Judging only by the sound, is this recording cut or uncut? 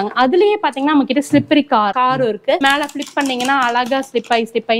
cut